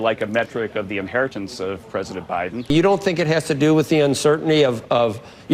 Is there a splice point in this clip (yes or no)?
yes